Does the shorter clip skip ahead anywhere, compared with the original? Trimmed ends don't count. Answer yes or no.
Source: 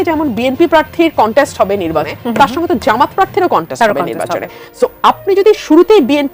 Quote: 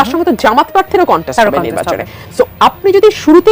no